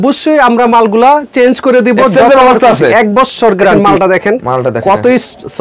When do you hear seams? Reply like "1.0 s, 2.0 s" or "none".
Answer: 3.8 s